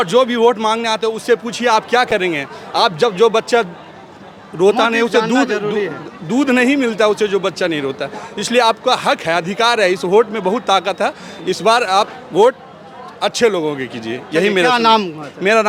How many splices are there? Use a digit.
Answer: 0